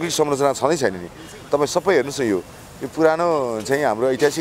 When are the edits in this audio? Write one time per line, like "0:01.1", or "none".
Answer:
none